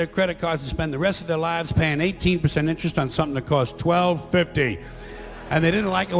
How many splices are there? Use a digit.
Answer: 0